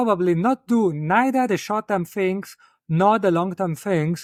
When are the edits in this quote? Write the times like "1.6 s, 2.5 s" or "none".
none